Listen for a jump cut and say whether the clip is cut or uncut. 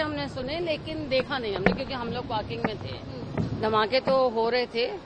uncut